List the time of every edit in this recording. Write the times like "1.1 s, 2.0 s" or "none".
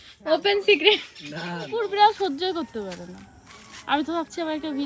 1.7 s